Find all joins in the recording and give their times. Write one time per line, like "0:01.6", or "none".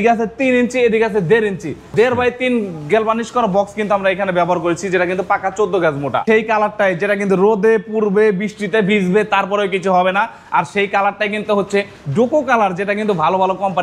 0:01.9
0:06.2